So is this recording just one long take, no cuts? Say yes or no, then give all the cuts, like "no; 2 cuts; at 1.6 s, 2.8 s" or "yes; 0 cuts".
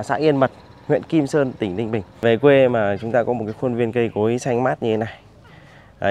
no; 1 cut; at 2.2 s